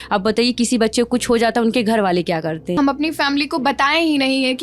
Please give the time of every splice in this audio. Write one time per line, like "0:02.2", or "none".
0:02.8